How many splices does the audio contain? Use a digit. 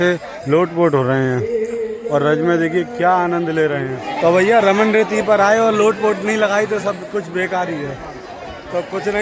1